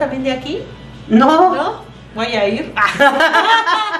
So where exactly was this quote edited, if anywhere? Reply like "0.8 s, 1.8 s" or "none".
none